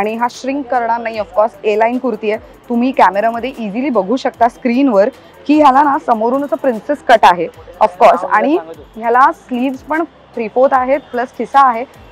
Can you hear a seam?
no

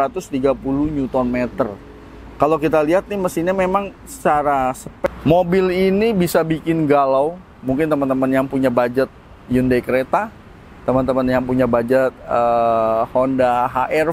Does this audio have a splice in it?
yes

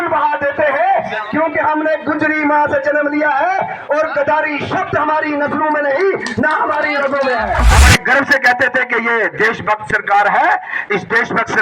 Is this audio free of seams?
no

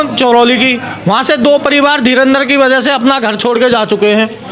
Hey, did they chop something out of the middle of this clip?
no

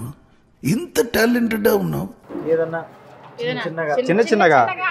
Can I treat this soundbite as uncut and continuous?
yes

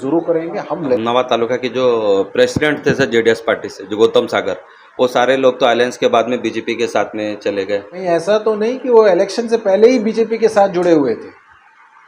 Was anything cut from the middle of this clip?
yes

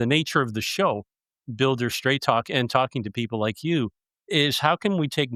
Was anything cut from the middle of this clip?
no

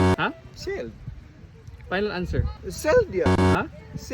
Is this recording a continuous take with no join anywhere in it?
no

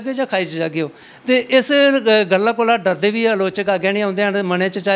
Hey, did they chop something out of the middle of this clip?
no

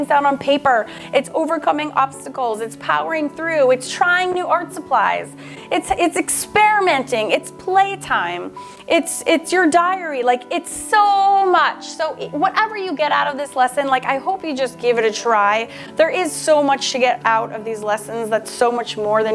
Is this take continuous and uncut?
no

